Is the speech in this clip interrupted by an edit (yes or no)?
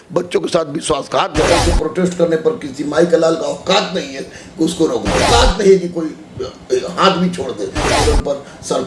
yes